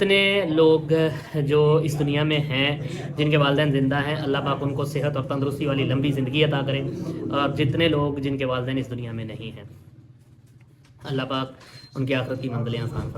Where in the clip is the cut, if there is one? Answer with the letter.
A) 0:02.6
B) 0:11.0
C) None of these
C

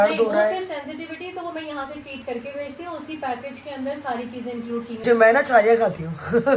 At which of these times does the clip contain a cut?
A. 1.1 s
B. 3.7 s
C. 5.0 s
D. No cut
C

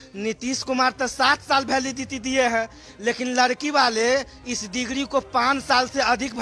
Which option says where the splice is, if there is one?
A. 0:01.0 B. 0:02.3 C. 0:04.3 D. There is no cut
D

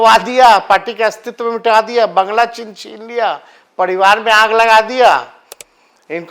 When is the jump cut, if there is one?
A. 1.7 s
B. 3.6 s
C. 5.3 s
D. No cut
D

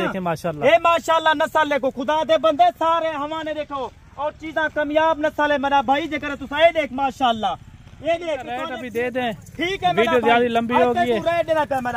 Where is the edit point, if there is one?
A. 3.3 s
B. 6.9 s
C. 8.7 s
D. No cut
C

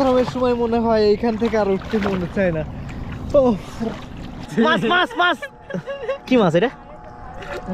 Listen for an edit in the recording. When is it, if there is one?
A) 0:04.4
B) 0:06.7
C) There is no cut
A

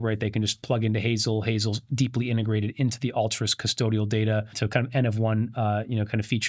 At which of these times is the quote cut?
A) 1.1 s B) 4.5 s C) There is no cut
B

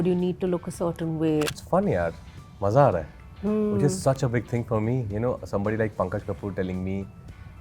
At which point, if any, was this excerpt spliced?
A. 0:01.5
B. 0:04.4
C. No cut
A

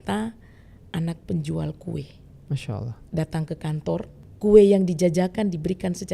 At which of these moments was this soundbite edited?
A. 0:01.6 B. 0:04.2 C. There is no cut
B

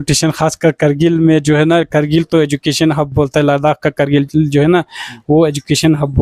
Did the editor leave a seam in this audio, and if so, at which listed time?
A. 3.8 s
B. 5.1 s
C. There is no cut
C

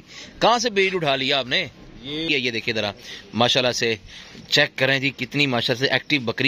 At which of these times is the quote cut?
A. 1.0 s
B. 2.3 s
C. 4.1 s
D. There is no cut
B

